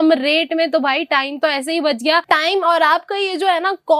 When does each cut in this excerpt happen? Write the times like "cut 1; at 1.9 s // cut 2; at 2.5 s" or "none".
cut 1; at 2.2 s